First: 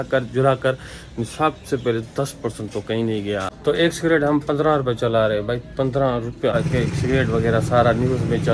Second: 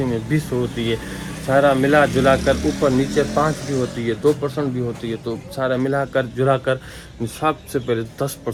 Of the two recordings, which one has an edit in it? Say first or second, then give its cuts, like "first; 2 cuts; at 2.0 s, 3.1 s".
first; 2 cuts; at 3.5 s, 6.5 s